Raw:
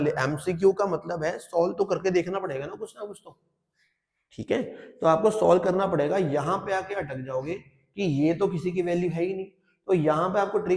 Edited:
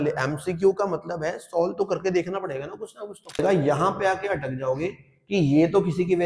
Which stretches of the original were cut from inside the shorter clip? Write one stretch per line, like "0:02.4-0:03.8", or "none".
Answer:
0:03.4-0:06.1